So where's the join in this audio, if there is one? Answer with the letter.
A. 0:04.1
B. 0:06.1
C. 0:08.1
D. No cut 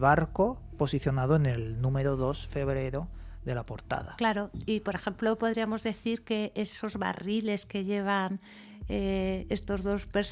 D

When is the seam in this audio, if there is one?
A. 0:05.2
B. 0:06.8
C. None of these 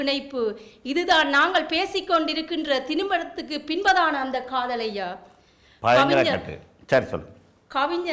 C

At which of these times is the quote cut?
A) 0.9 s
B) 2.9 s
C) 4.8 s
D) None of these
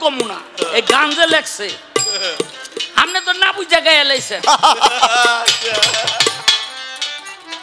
D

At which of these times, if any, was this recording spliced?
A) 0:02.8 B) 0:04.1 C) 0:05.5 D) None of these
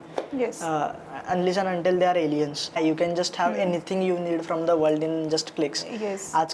A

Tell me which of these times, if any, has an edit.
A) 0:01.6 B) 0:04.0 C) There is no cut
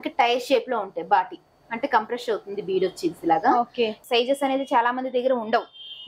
B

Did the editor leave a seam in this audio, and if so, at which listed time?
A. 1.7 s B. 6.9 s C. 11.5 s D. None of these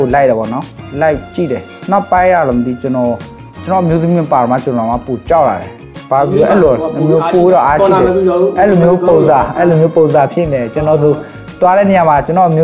A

